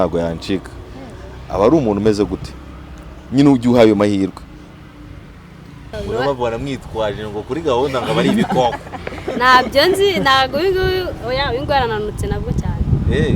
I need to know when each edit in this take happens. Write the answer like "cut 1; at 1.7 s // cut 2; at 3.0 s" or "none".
cut 1; at 5.9 s